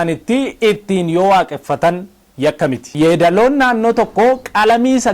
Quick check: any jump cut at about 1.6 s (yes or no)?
no